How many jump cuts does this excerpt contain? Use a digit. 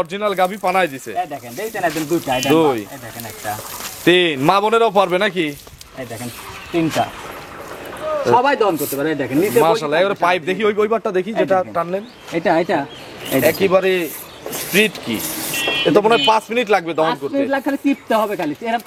0